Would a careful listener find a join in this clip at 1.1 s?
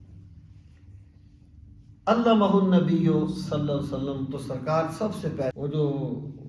no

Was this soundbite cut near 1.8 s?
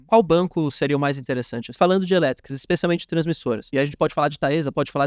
yes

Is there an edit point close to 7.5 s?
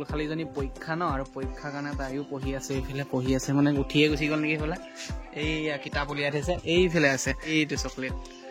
yes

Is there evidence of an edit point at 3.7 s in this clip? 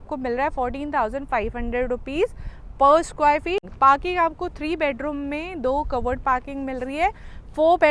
yes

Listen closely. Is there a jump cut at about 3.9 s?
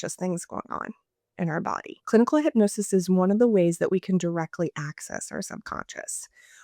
no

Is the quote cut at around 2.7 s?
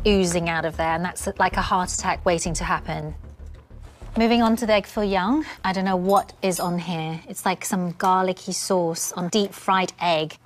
yes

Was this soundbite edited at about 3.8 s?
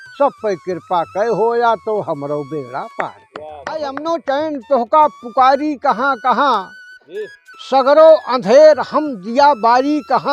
yes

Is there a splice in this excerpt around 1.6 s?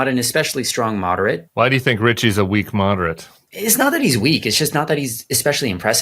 yes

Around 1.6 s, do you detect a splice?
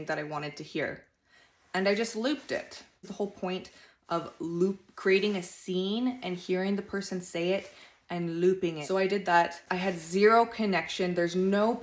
no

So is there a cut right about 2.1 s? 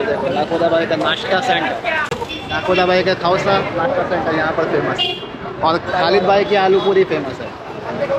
no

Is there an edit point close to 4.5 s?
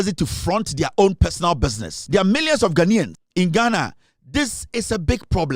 no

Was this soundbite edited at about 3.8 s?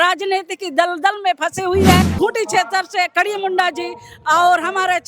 no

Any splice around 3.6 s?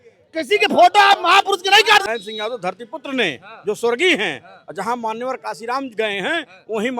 no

